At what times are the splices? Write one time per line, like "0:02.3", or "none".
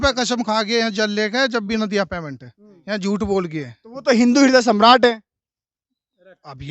none